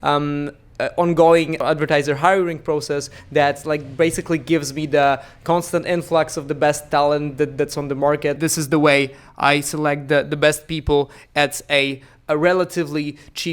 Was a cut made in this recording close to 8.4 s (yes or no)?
yes